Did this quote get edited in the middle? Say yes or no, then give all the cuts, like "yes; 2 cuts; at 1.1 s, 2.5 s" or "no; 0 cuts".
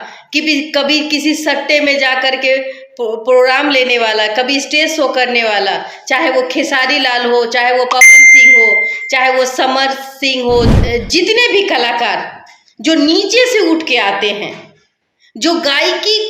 yes; 1 cut; at 10.7 s